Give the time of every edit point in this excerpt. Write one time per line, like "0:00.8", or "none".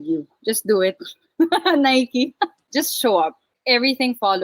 0:02.6